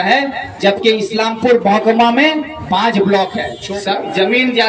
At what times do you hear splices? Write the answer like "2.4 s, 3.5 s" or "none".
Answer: 3.5 s